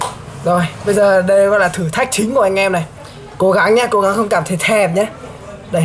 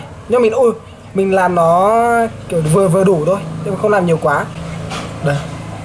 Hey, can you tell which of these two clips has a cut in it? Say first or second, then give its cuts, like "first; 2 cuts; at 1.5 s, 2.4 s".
second; 1 cut; at 4.6 s